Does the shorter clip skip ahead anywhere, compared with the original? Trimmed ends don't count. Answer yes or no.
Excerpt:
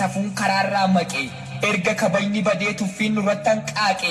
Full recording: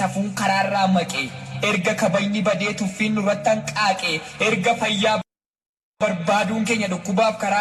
no